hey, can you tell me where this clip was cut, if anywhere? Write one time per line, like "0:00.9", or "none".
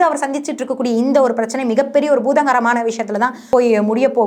0:03.4